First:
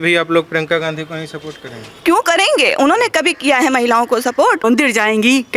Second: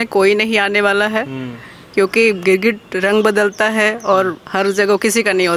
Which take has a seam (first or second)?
first